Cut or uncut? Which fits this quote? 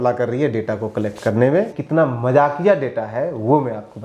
cut